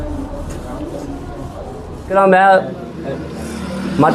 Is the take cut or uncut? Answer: cut